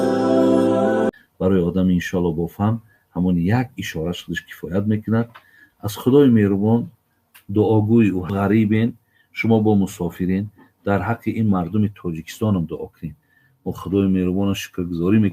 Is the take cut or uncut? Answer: cut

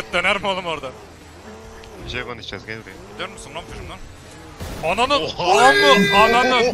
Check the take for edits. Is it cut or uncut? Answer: uncut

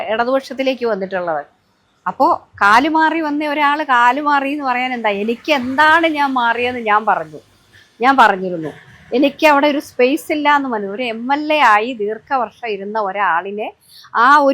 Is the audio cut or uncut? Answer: uncut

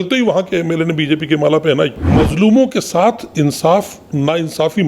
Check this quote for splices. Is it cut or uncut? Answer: cut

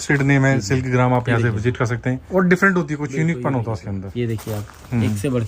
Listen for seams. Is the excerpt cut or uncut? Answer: cut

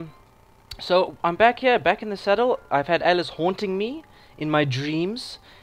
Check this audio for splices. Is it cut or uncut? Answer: uncut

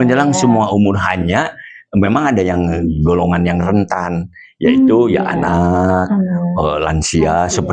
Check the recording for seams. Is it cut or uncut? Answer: uncut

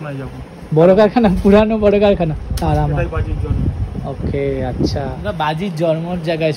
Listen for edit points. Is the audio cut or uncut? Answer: cut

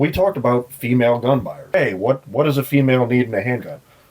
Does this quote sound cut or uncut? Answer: cut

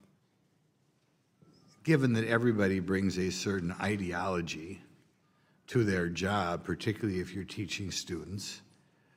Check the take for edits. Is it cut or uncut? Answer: uncut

